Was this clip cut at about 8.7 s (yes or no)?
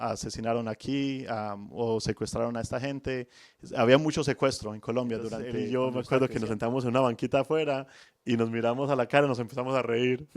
no